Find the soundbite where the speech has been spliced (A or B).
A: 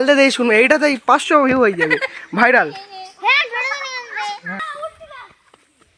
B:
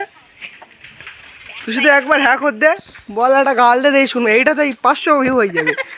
A